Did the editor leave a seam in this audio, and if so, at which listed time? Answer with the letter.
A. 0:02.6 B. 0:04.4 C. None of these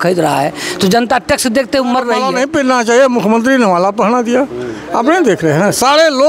A